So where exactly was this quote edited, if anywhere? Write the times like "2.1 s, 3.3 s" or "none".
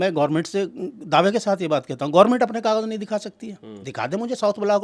none